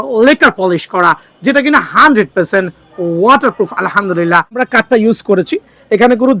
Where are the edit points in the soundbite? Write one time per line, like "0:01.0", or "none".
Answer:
0:04.6